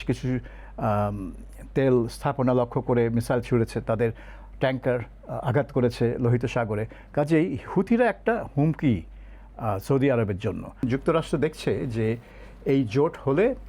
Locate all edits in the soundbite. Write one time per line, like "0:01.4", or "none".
0:10.8